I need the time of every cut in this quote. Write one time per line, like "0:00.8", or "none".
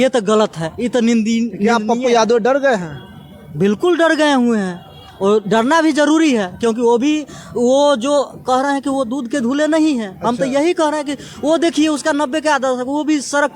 none

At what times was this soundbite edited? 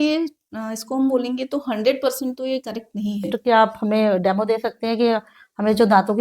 0:03.3

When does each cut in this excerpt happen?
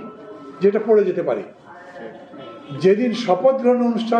none

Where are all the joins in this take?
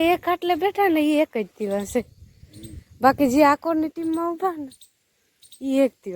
none

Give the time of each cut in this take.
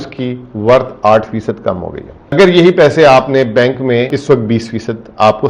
0:02.3
0:04.1

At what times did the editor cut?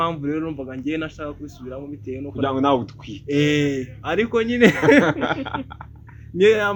none

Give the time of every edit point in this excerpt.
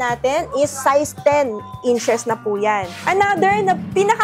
0:03.0

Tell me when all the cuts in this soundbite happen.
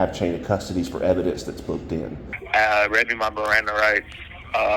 0:02.4

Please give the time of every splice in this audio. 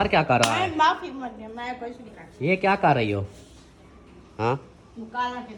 none

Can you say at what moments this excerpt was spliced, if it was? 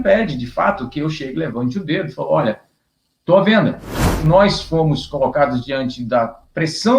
0:04.2

